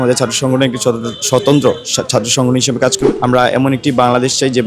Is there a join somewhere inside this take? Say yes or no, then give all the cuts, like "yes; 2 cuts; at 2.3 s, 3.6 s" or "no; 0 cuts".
yes; 1 cut; at 3.0 s